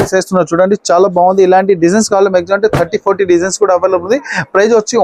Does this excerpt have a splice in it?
no; 0 cuts

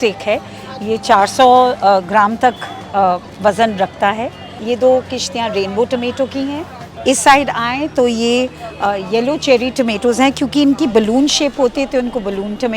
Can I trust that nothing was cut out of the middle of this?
no; 1 cut; at 4.5 s

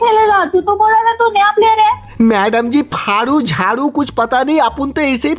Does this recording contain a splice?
no; 0 cuts

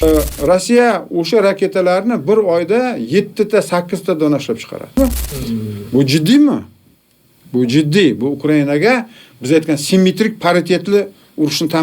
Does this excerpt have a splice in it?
yes; 1 cut; at 4.9 s

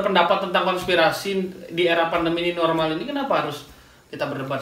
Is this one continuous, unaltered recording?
yes; 0 cuts

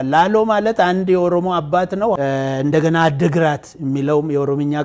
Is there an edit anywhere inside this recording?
yes; 1 cut; at 2.2 s

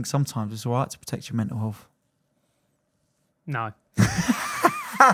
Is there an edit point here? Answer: no; 0 cuts

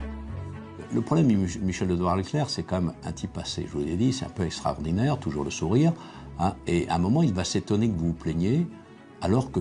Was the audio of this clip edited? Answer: no; 0 cuts

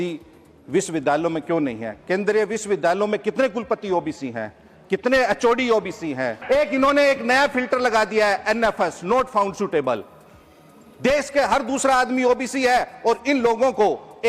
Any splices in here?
yes; 1 cut; at 6.4 s

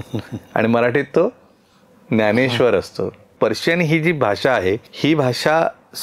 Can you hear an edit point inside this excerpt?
yes; 2 cuts; at 3.3 s, 4.9 s

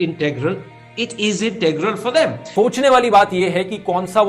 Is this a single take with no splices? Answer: no; 1 cut; at 2.4 s

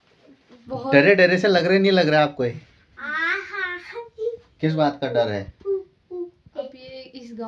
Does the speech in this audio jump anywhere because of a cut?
no; 0 cuts

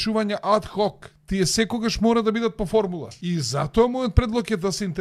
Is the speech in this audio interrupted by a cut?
yes; 2 cuts; at 1.1 s, 3.1 s

